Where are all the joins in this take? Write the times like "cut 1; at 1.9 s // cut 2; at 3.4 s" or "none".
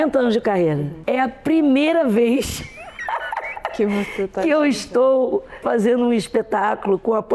cut 1; at 0.9 s // cut 2; at 5.5 s